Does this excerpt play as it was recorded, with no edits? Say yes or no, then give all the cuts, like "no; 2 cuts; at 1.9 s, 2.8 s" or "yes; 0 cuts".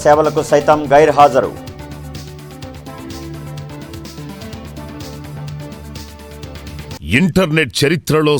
no; 1 cut; at 6.9 s